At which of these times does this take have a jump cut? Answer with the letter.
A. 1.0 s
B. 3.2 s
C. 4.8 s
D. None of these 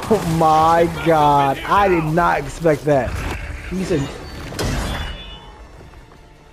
B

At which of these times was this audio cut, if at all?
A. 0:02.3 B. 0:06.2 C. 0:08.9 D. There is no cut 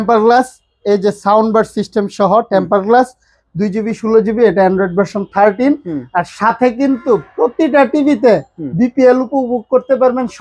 D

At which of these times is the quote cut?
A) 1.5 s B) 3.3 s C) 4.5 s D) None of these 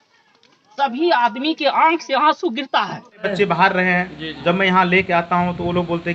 B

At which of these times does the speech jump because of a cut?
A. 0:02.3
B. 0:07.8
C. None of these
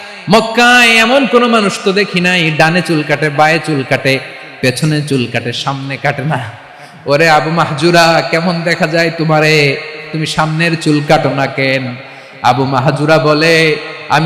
C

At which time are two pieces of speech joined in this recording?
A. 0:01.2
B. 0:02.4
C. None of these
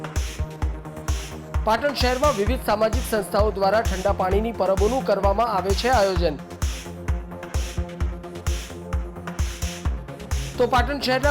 A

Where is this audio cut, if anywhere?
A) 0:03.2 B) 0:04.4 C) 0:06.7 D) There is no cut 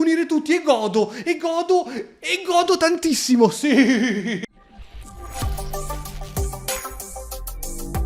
B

